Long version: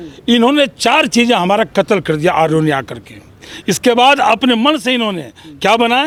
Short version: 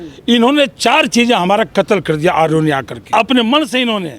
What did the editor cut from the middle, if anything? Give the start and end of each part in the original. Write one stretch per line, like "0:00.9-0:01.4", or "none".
0:03.1-0:04.3